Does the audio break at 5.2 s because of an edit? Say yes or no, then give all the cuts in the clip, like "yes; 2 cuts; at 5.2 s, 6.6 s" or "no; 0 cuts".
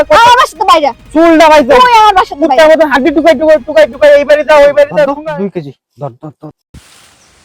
yes; 1 cut; at 5.2 s